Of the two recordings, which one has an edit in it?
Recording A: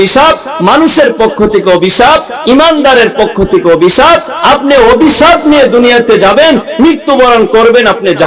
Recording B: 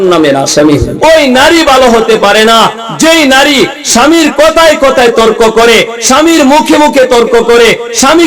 B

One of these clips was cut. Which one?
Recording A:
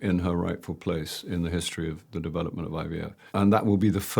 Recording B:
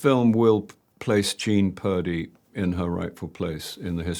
A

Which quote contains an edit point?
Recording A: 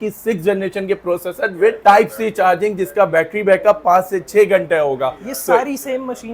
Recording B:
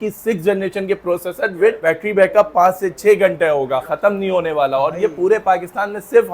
B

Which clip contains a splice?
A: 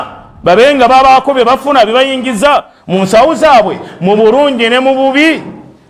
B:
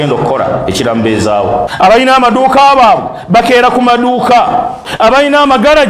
B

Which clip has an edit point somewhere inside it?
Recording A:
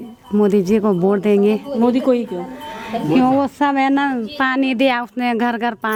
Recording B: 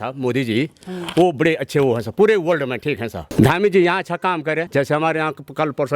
B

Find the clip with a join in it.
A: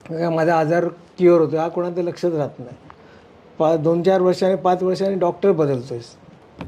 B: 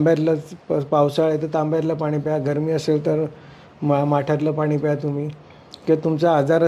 A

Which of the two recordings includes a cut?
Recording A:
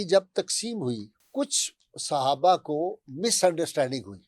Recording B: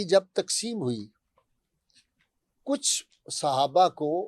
A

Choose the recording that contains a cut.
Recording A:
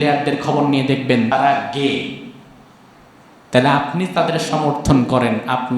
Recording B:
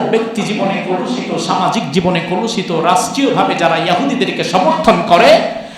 A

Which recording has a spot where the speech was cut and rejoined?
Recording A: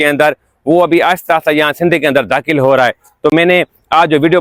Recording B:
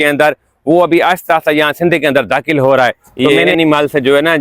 B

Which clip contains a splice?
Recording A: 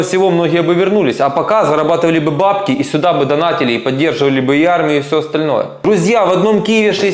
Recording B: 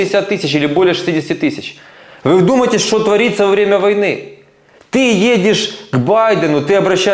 A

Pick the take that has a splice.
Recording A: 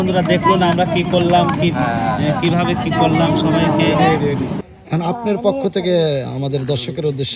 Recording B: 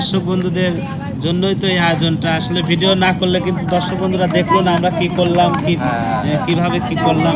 A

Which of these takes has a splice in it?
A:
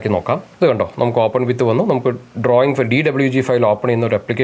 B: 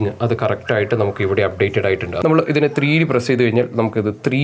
B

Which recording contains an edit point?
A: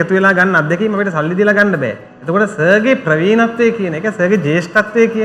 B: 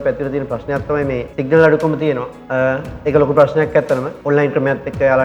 B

